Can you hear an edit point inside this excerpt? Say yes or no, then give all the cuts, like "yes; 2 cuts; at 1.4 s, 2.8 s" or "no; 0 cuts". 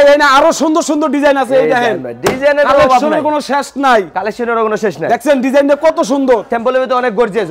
no; 0 cuts